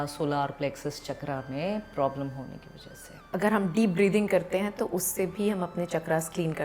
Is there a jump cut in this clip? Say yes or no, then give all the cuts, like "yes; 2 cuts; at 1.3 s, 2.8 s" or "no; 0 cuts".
yes; 1 cut; at 3.2 s